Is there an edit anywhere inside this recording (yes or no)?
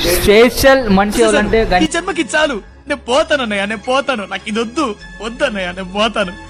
no